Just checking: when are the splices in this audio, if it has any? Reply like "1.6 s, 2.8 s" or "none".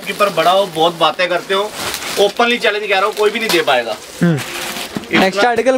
none